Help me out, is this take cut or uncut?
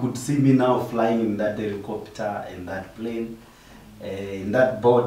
uncut